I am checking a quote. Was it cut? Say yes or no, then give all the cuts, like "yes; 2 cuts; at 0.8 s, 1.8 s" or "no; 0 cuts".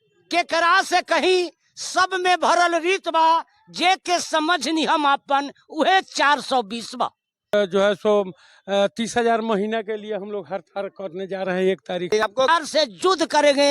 yes; 2 cuts; at 7.5 s, 12.2 s